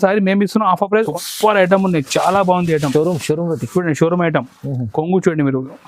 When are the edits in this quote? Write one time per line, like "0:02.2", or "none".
0:01.1